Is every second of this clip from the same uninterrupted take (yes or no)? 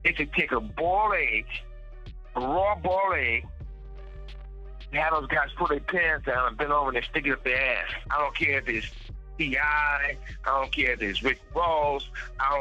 no